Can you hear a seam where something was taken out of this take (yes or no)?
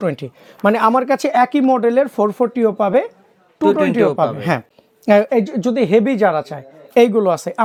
no